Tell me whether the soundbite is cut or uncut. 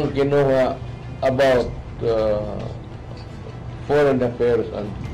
uncut